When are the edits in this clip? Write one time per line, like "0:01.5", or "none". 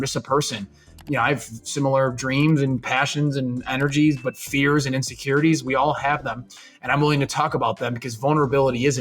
0:01.0